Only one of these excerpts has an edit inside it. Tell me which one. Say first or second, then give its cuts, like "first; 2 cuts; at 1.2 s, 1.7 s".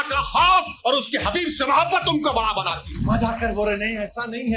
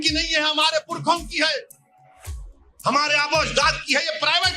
first; 1 cut; at 2.9 s